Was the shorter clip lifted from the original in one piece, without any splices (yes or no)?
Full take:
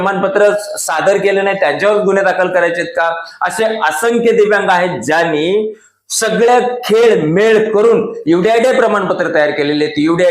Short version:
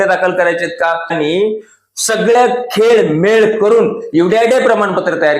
no